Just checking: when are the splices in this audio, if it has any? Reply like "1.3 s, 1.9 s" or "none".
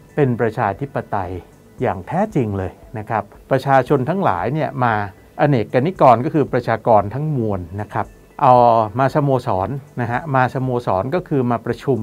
3.4 s